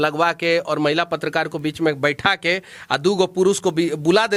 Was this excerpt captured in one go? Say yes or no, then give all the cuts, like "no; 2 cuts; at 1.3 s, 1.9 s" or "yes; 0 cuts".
yes; 0 cuts